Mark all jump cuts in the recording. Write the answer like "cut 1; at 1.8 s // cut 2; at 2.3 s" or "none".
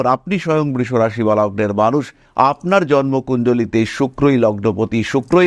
none